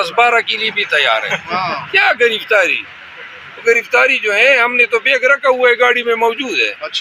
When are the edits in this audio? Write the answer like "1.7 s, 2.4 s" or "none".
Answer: none